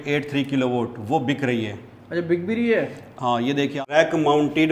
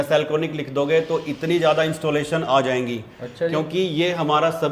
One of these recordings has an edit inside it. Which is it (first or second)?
first